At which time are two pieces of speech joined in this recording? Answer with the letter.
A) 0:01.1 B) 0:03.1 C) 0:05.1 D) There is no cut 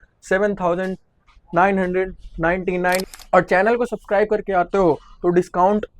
B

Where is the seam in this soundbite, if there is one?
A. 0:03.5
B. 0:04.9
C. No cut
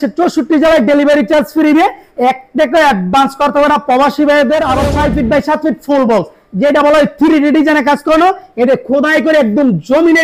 B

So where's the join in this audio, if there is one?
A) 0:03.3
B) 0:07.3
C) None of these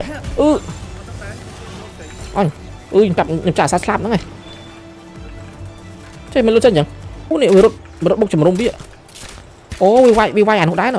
B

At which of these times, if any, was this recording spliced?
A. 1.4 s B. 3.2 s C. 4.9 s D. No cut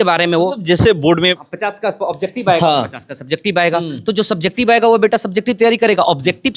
A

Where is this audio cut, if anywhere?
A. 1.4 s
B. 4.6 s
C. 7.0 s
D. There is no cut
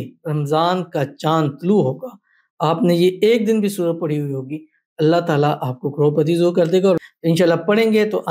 C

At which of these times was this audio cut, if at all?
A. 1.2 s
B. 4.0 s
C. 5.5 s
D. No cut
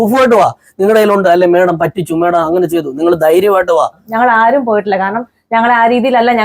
B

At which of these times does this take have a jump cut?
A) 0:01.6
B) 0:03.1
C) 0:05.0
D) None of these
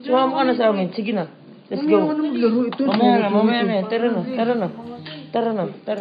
D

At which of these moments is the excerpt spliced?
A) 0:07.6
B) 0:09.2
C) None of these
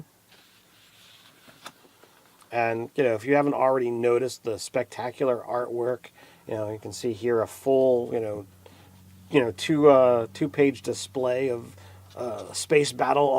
B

